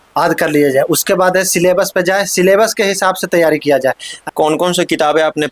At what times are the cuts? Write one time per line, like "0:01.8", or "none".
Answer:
0:04.2